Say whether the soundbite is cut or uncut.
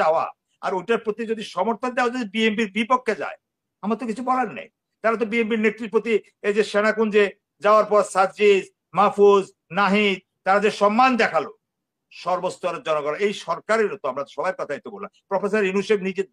uncut